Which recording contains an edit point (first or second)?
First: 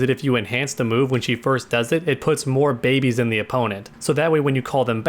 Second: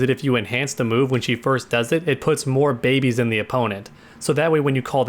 first